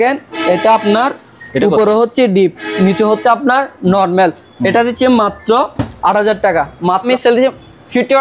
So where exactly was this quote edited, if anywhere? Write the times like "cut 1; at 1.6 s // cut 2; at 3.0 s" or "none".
cut 1; at 7.1 s